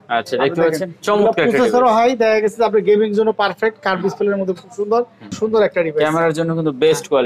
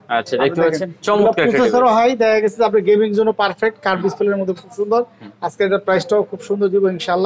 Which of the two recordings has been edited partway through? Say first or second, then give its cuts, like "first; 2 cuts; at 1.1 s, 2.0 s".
first; 1 cut; at 5.2 s